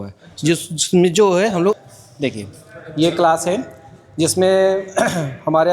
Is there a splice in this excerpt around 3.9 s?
no; 1 cut; at 1.8 s

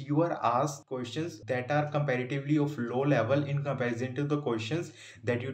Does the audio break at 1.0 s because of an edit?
yes; 1 cut; at 1.0 s

